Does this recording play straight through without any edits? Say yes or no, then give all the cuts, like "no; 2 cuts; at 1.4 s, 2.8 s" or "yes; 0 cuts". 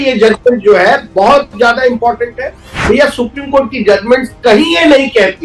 no; 1 cut; at 2.8 s